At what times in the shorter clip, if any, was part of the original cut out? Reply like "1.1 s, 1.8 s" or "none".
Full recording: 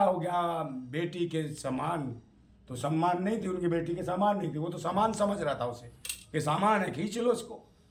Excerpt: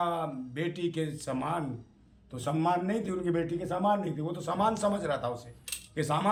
none